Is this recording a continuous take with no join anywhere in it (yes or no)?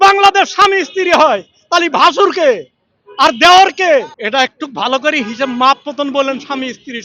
no